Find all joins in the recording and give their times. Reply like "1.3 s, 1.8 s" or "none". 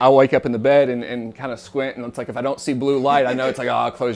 none